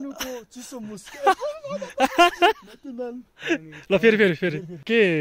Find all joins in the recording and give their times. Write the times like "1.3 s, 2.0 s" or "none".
none